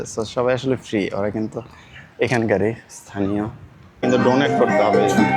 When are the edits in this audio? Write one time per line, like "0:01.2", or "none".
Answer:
0:04.0